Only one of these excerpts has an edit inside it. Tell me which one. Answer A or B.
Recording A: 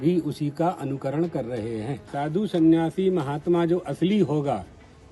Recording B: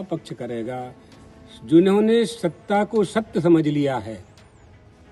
A